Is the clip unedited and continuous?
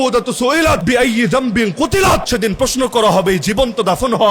no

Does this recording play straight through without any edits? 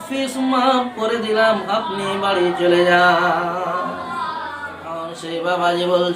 no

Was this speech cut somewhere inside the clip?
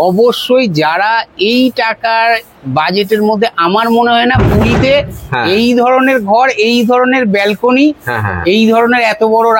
no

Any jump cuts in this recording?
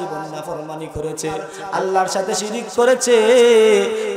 yes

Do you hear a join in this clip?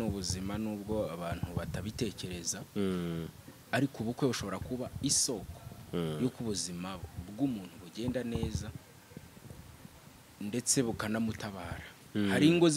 no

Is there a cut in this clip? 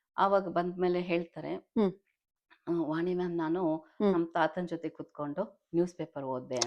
no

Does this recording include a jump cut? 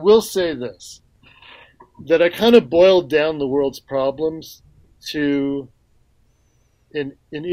yes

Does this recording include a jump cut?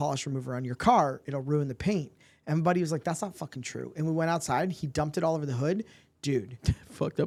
no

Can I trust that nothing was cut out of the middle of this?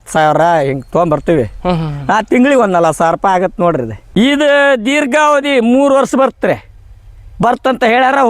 no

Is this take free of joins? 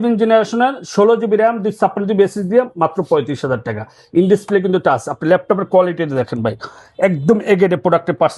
yes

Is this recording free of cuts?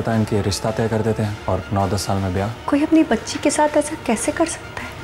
no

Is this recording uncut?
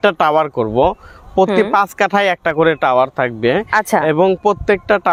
yes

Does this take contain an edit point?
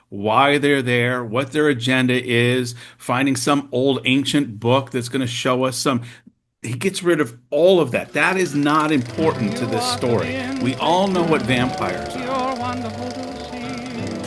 yes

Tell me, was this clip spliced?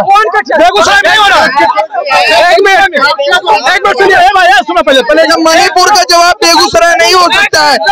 no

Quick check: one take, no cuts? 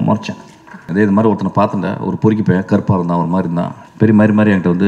no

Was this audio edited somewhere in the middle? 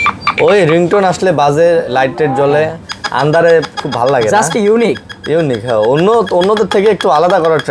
no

